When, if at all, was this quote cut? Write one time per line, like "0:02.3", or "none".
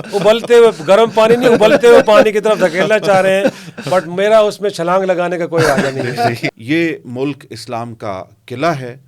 0:06.4